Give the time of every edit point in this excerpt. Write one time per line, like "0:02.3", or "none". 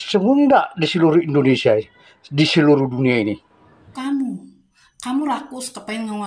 0:03.9